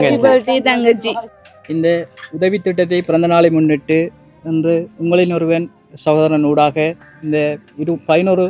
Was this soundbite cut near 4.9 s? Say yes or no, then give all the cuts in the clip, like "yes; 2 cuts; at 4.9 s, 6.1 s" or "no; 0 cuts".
no; 1 cut; at 1.2 s